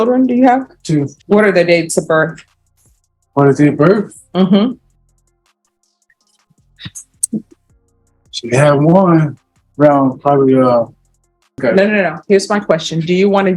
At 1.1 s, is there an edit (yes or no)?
yes